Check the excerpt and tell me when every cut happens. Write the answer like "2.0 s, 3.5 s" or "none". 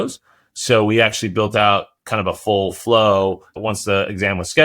3.5 s